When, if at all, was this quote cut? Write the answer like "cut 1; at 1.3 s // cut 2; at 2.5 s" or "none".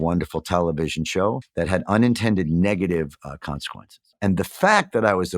cut 1; at 1.5 s